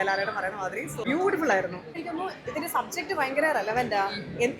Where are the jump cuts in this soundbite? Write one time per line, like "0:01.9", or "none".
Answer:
0:01.0
0:02.0